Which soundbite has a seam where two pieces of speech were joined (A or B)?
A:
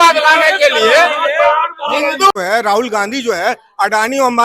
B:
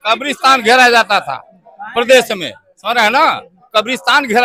A